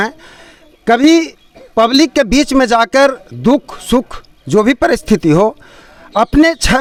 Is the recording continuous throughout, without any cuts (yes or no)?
yes